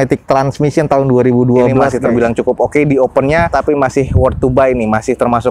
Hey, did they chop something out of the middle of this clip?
yes; 2 cuts; at 1.9 s, 3.5 s

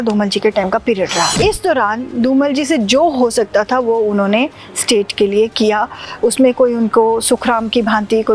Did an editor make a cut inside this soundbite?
yes; 1 cut; at 1.3 s

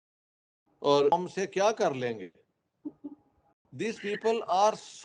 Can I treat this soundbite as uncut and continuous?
no; 1 cut; at 1.1 s

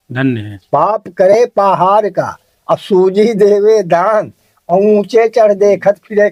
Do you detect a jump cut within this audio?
no; 0 cuts

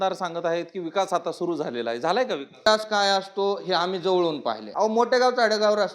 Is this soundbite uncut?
no; 2 cuts; at 2.6 s, 4.6 s

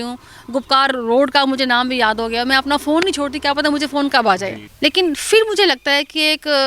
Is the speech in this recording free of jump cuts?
no; 1 cut; at 4.6 s

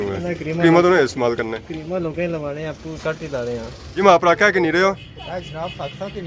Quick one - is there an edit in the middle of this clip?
yes; 1 cut; at 4.0 s

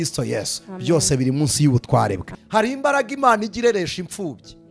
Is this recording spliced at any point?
yes; 1 cut; at 2.3 s

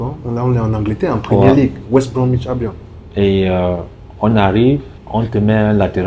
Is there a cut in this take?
yes; 1 cut; at 5.0 s

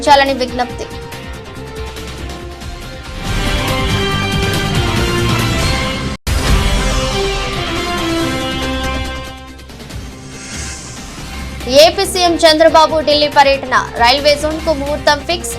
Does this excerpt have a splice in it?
yes; 2 cuts; at 1.8 s, 6.2 s

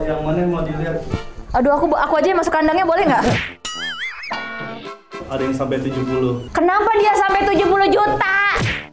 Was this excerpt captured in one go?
no; 2 cuts; at 5.2 s, 6.4 s

